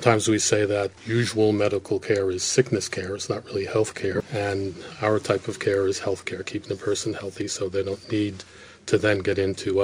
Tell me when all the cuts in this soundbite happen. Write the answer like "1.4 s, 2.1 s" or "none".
1.0 s, 4.2 s